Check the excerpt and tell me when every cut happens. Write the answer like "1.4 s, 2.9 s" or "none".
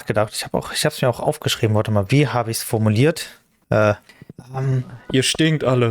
3.1 s, 4.4 s